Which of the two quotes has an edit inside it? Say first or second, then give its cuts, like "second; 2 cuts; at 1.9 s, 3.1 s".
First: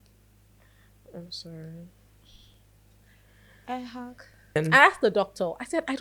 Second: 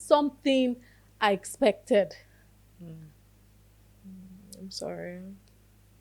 first; 1 cut; at 4.6 s